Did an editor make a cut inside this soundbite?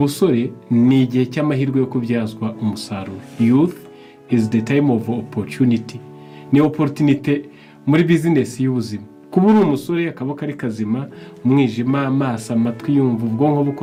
no; 0 cuts

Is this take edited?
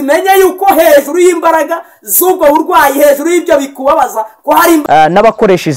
yes; 1 cut; at 4.8 s

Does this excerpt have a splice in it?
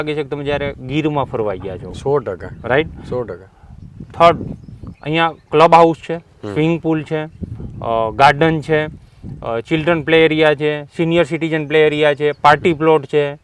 no; 0 cuts

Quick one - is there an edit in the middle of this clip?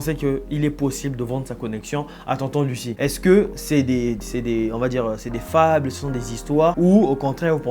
yes; 2 cuts; at 2.9 s, 6.8 s

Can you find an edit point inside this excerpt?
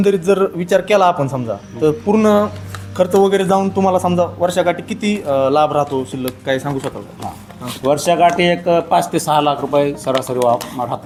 no; 0 cuts

